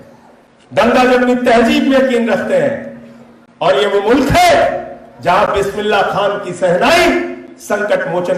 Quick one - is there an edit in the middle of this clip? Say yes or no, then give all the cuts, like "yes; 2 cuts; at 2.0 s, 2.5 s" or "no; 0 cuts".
no; 0 cuts